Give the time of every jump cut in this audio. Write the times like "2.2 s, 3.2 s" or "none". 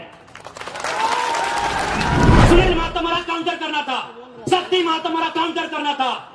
2.4 s